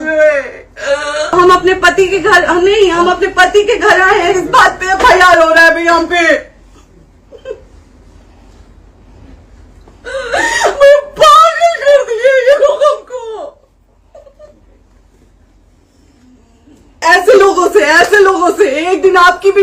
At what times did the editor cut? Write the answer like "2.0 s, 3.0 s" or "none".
1.3 s, 17.0 s